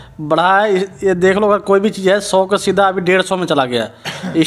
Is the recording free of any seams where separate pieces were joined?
yes; 0 cuts

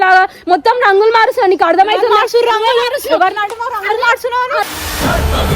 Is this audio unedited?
yes; 0 cuts

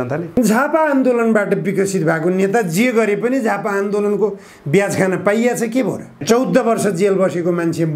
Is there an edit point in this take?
yes; 1 cut; at 6.2 s

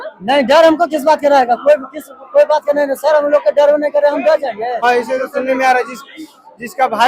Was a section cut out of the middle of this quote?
yes; 1 cut; at 4.8 s

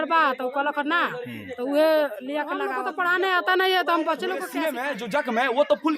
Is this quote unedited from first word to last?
no; 2 cuts; at 2.7 s, 4.5 s

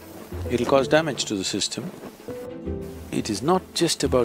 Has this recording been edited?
yes; 1 cut; at 2.5 s

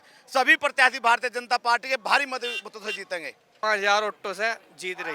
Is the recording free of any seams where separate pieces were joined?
no; 1 cut; at 3.5 s

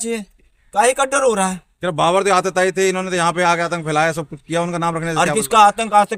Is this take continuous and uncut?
yes; 0 cuts

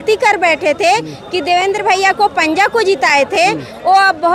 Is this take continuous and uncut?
yes; 0 cuts

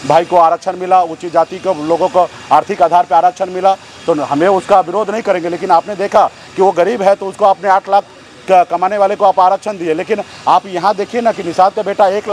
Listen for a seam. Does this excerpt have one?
no; 0 cuts

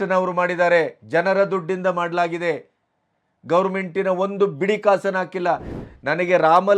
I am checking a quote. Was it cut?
yes; 1 cut; at 5.7 s

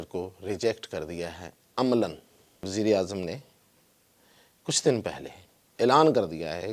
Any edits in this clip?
yes; 1 cut; at 2.7 s

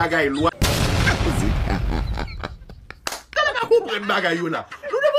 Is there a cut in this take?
no; 0 cuts

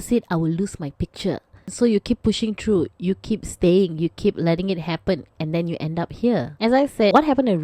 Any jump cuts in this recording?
no; 0 cuts

